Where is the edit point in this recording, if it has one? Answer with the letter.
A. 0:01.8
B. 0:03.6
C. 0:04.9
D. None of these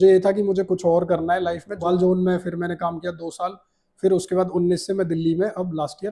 A